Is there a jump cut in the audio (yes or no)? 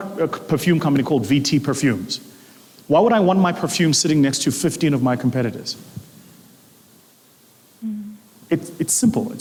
no